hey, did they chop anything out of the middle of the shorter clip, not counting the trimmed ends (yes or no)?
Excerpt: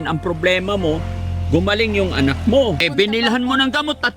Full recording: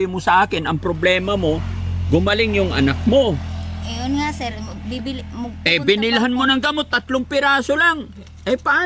yes